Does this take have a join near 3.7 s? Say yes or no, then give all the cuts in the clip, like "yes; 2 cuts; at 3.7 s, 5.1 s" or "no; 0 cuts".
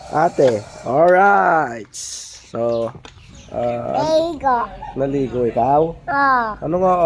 yes; 1 cut; at 3.7 s